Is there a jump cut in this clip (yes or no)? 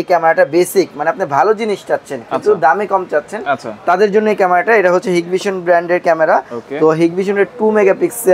no